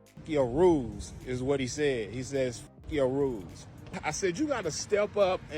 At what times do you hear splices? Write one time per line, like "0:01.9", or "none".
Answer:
0:04.0